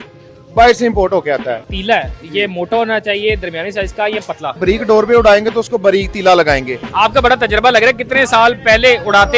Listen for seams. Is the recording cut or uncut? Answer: cut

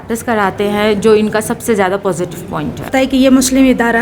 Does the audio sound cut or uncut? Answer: cut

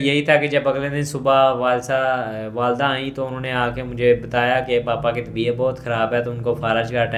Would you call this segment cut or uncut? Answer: uncut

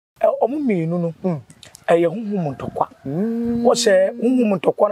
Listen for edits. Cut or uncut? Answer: uncut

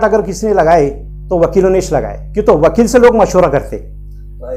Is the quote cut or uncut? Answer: uncut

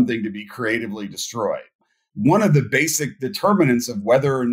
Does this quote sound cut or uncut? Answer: cut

